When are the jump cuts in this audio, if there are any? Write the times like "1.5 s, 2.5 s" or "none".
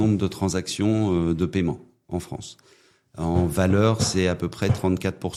none

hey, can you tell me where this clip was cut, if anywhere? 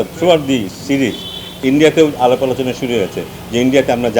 1.5 s

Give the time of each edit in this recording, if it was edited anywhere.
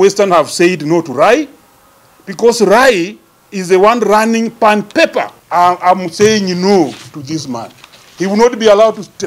5.4 s

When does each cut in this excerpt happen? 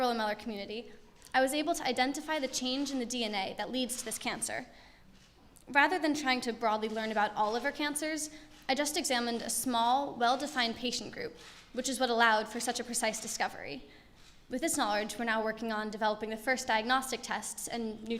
11.8 s

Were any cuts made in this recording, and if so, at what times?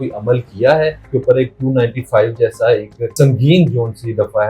1.0 s, 3.1 s

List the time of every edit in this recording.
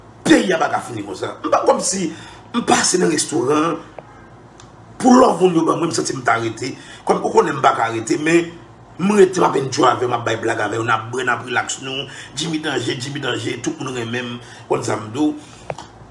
11.2 s

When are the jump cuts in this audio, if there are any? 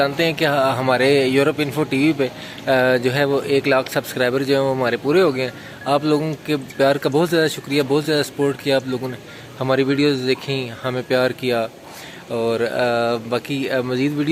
none

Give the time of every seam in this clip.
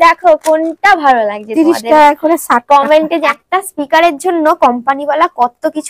3.3 s

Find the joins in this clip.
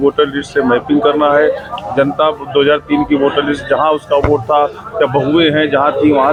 none

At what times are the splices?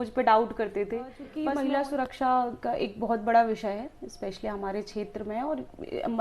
1.3 s

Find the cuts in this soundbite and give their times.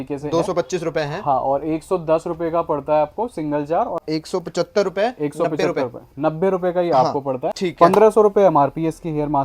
4.0 s, 7.6 s

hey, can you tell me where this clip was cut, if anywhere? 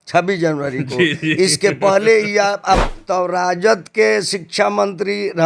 2.9 s

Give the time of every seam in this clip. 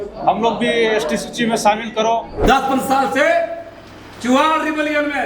2.4 s

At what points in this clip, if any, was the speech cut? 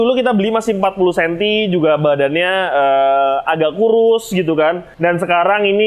4.9 s

